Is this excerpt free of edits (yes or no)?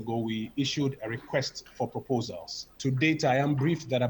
yes